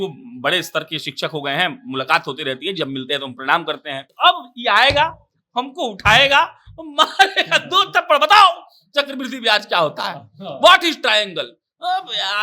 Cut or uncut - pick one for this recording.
cut